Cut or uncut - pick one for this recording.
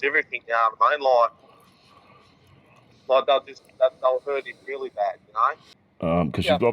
uncut